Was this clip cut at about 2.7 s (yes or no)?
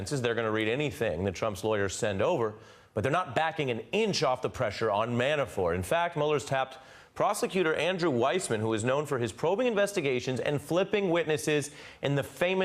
no